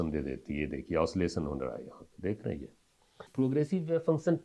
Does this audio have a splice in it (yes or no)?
yes